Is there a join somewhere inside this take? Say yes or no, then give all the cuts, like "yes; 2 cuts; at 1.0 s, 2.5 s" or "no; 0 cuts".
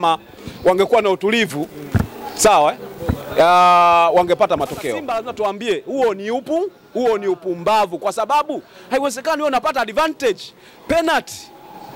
yes; 1 cut; at 5.0 s